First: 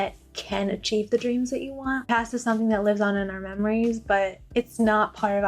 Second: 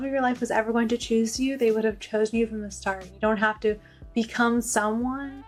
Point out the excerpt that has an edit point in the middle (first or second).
first